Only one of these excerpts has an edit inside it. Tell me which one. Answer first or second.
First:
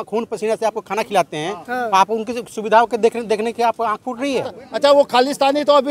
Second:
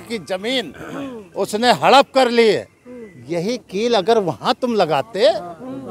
first